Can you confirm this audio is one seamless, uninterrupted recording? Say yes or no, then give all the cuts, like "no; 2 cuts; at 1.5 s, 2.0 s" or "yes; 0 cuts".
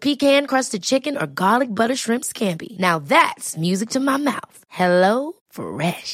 yes; 0 cuts